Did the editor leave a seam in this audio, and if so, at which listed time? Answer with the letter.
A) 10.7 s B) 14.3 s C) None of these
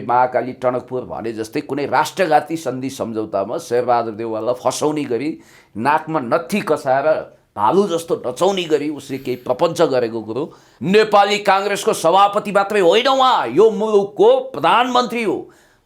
A